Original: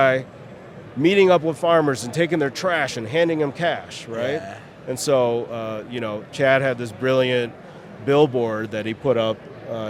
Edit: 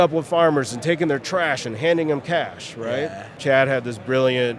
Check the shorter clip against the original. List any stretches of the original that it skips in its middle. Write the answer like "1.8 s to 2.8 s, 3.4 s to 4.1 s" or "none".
4.6 s to 6.2 s